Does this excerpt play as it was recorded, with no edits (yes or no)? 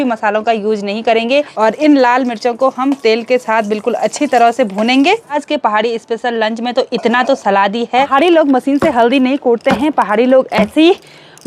no